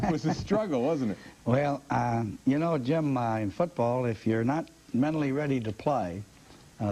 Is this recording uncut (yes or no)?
yes